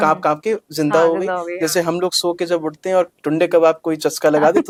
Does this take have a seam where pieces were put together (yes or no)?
no